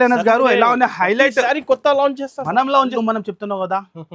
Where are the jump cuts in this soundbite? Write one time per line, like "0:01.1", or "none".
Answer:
0:02.9